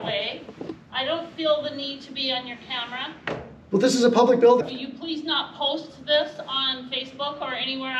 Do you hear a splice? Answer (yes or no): yes